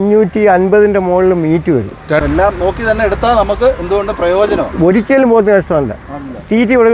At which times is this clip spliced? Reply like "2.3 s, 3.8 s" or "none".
2.2 s